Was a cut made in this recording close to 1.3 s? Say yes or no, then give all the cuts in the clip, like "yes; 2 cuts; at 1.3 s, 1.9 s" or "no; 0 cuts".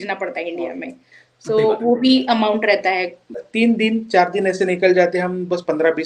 no; 1 cut; at 3.5 s